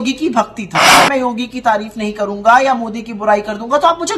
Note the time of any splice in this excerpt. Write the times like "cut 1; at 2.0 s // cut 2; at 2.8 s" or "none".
cut 1; at 0.9 s